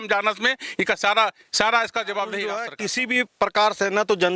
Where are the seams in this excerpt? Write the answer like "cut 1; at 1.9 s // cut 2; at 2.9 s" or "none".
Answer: cut 1; at 2.8 s